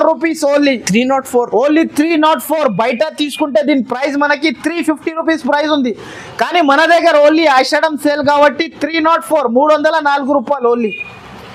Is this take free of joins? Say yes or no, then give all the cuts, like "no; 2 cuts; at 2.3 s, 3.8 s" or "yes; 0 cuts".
yes; 0 cuts